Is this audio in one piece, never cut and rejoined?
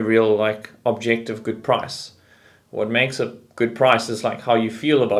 yes; 0 cuts

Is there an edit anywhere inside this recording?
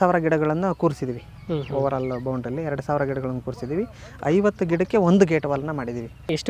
no; 0 cuts

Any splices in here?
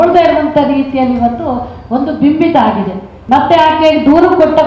yes; 1 cut; at 3.1 s

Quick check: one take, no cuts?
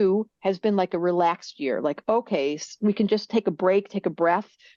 yes; 0 cuts

